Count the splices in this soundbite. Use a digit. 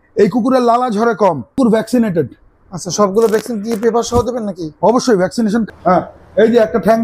2